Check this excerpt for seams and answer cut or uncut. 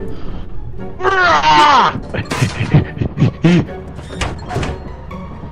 cut